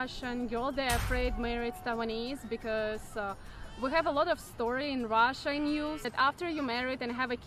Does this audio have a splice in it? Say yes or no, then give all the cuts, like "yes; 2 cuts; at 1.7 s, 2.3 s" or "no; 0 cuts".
yes; 1 cut; at 6.0 s